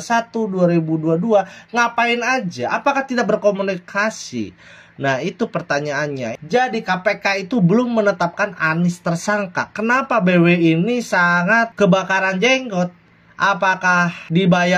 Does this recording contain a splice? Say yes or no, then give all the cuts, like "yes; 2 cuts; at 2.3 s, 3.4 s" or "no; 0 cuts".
yes; 1 cut; at 6.3 s